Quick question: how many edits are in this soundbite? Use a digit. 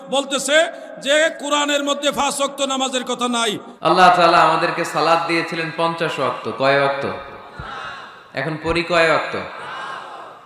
1